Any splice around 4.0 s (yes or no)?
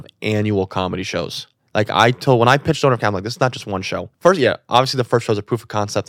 yes